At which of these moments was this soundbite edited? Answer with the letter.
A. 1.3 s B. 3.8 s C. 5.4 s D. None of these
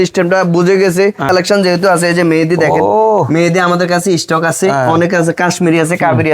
A